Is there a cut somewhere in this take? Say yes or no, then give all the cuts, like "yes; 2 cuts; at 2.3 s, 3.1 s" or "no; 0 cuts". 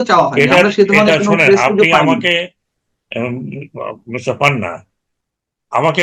no; 0 cuts